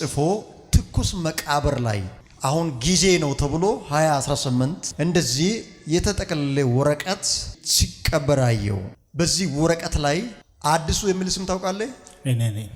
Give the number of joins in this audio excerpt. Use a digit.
1